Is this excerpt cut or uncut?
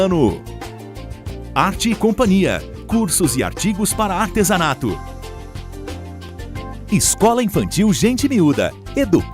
cut